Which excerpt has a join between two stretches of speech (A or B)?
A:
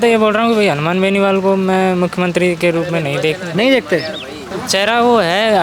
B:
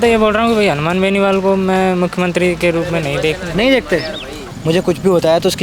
B